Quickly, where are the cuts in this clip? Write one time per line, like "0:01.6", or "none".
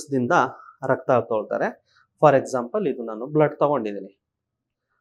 none

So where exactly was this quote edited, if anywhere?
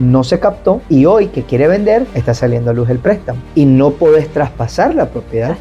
0:03.4

